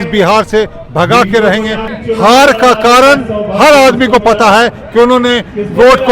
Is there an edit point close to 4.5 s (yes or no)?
no